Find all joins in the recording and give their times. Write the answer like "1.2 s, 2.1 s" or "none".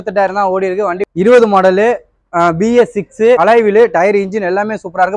1.0 s, 3.4 s

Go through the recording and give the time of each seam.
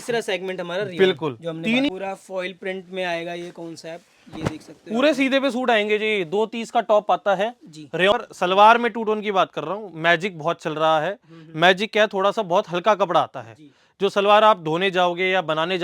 1.9 s, 8.1 s

